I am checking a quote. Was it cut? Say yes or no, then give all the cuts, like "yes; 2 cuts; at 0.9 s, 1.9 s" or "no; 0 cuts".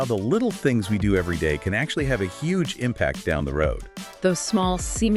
no; 0 cuts